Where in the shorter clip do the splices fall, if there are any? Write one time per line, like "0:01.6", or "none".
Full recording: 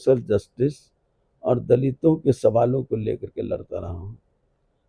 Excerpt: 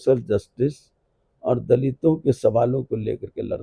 none